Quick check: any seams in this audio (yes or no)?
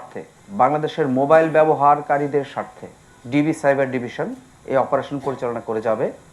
no